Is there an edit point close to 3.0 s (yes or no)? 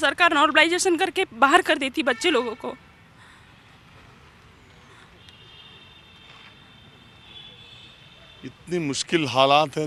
no